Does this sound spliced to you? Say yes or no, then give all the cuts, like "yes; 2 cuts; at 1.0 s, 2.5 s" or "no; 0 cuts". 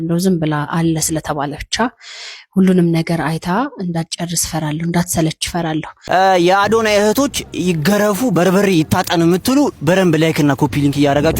yes; 1 cut; at 5.9 s